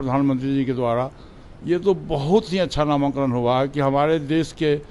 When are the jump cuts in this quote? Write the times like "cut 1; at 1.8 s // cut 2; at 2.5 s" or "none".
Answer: none